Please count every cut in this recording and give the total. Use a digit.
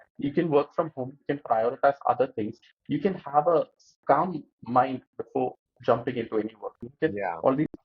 3